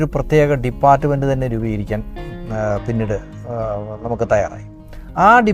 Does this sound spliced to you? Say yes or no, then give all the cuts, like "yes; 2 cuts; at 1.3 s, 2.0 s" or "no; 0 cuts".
no; 0 cuts